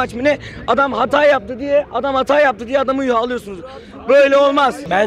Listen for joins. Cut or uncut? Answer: uncut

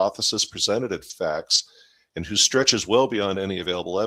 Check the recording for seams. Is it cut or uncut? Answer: uncut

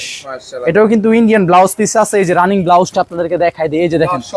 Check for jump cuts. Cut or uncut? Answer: uncut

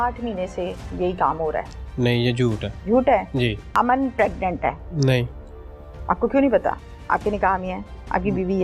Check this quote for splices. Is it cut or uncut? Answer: cut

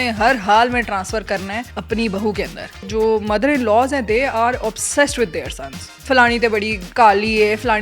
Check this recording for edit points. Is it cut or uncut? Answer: cut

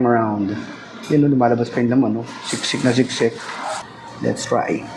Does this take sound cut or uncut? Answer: cut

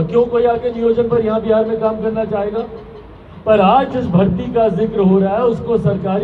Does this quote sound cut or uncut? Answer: uncut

